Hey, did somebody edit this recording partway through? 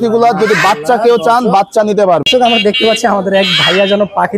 yes; 1 cut; at 2.2 s

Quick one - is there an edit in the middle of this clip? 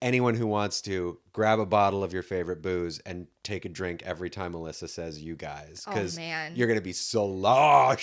no; 0 cuts

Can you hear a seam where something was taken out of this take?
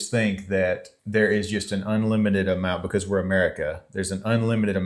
yes; 1 cut; at 0.9 s

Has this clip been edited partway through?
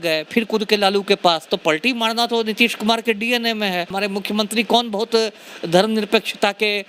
yes; 1 cut; at 3.9 s

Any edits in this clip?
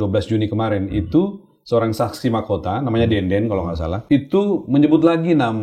yes; 1 cut; at 3.9 s

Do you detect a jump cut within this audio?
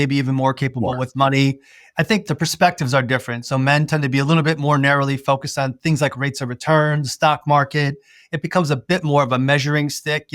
yes; 1 cut; at 2.2 s

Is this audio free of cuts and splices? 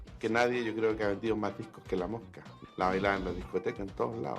no; 1 cut; at 2.6 s

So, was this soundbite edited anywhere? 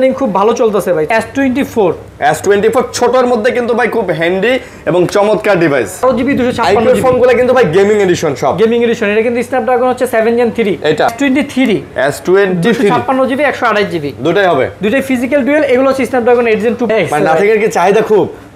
yes; 4 cuts; at 1.1 s, 6.0 s, 11.1 s, 16.9 s

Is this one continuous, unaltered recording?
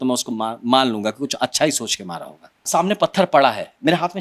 no; 1 cut; at 2.6 s

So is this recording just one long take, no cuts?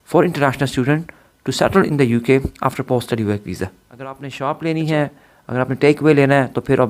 no; 1 cut; at 4.3 s

